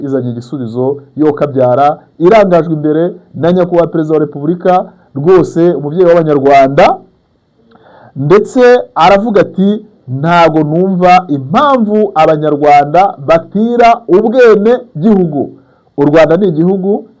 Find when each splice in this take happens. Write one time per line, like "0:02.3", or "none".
none